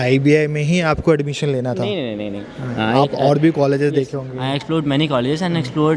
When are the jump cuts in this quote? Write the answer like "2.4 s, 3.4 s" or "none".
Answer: none